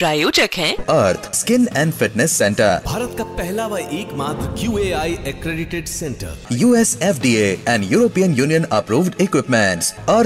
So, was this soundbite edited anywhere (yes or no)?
no